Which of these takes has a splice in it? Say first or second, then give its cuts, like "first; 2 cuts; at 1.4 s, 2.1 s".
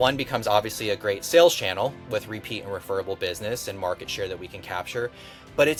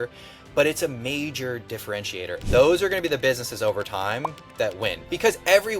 second; 1 cut; at 2.4 s